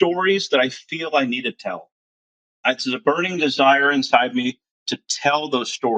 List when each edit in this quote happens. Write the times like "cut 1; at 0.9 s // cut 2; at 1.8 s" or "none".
none